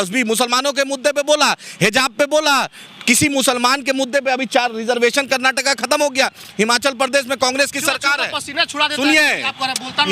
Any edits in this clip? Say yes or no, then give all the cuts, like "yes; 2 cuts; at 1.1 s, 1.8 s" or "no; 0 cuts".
no; 0 cuts